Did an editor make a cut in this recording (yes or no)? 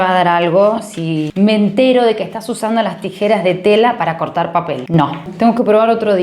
yes